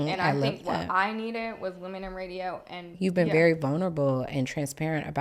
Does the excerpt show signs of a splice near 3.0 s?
yes; 1 cut; at 3.0 s

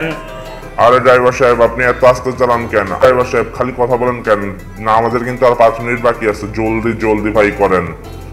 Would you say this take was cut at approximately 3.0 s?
yes; 1 cut; at 3.0 s

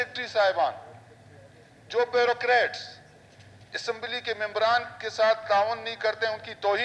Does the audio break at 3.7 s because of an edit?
no; 0 cuts

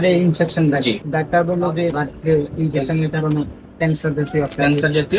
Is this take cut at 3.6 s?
no; 2 cuts; at 1.0 s, 2.0 s

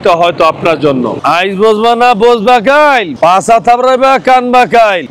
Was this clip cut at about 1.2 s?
yes; 1 cut; at 1.2 s

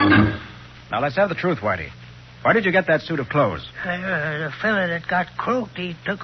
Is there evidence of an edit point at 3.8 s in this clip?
no; 1 cut; at 1.0 s

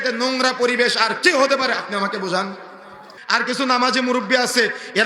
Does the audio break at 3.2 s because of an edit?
yes; 1 cut; at 3.2 s

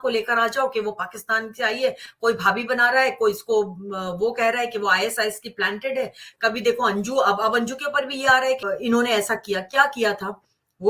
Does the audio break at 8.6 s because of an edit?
yes; 1 cut; at 8.6 s

